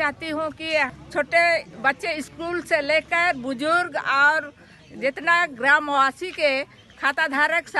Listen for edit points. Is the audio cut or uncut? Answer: cut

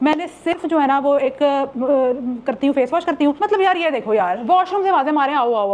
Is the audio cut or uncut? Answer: cut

